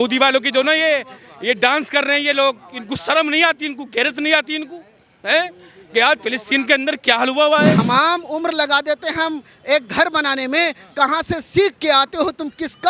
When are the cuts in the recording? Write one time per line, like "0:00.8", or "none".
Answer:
0:07.8